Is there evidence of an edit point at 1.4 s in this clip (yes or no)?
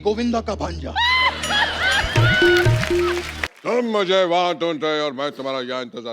no